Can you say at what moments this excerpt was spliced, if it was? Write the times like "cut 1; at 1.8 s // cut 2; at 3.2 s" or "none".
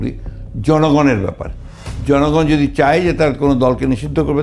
none